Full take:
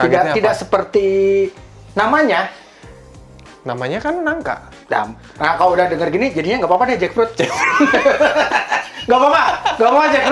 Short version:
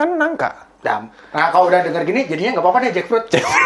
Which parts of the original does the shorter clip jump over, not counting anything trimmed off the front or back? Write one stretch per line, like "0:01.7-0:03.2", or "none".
none